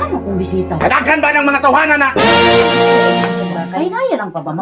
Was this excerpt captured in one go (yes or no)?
yes